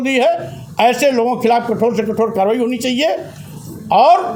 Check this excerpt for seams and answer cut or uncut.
uncut